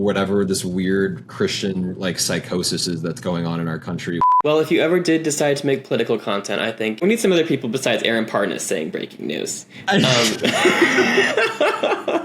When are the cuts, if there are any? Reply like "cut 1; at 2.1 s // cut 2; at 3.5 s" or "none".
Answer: cut 1; at 4.3 s // cut 2; at 7.0 s